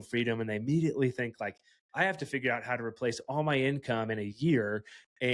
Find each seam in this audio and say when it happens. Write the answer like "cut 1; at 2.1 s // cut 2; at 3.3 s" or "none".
none

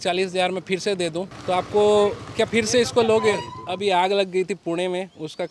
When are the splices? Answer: cut 1; at 1.3 s // cut 2; at 3.6 s

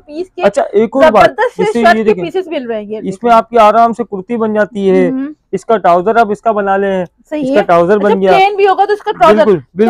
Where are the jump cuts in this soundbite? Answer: none

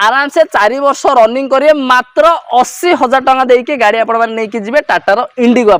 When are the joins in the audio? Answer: none

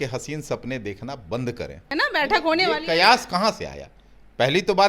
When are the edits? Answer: cut 1; at 1.9 s

